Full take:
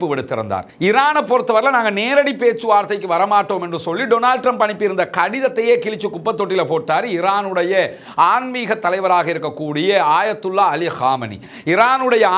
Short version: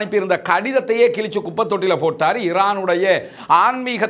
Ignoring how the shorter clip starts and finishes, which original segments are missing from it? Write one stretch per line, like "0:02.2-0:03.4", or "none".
none